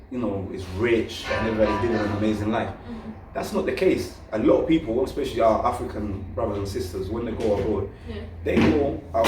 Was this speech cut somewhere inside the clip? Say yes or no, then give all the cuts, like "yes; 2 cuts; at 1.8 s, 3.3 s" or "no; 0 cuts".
no; 0 cuts